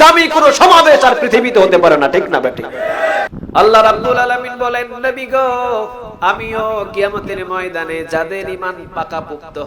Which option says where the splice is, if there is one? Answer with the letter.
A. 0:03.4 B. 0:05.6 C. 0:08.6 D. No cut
A